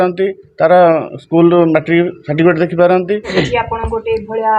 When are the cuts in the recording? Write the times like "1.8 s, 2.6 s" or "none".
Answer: 3.3 s